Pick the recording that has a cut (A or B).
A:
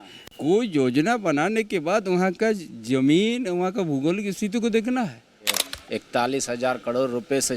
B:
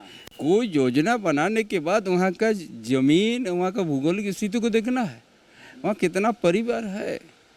A